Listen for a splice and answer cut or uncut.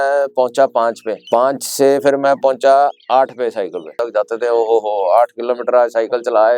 cut